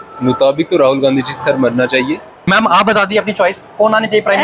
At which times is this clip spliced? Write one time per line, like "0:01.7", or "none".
0:02.3